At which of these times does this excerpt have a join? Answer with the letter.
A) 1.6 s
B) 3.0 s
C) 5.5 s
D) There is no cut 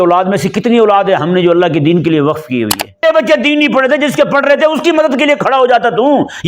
B